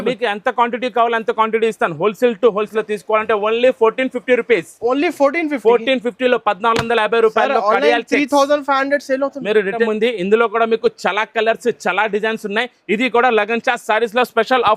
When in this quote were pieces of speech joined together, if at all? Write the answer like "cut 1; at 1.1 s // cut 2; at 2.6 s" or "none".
cut 1; at 2.7 s // cut 2; at 9.9 s